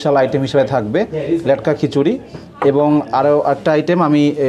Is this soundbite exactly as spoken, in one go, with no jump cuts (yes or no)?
yes